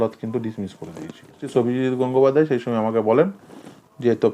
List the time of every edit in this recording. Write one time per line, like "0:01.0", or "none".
0:01.4